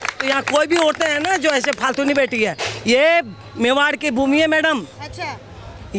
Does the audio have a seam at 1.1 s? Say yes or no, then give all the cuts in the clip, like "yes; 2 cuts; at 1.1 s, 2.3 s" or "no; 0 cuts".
no; 0 cuts